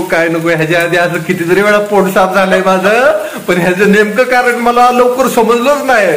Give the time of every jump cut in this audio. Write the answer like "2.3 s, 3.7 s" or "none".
none